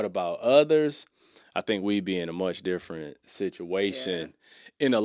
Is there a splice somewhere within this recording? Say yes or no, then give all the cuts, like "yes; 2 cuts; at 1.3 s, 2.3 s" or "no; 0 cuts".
no; 0 cuts